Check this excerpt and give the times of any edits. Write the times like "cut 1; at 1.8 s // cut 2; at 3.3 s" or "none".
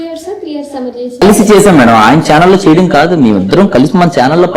cut 1; at 1.2 s